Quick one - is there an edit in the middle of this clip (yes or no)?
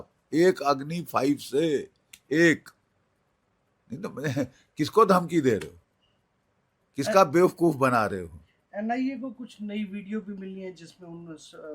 no